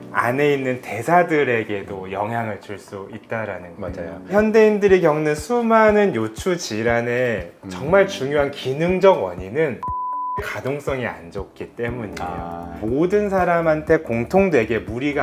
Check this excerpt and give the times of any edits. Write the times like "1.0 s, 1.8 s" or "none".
4.3 s, 12.8 s